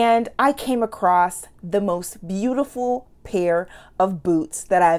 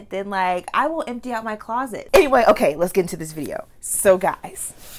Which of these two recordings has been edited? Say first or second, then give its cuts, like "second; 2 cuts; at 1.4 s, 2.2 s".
second; 1 cut; at 2.0 s